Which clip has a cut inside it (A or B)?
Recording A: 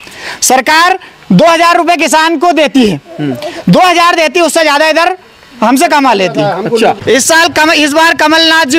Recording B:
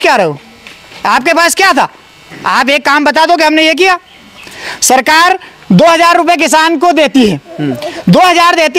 A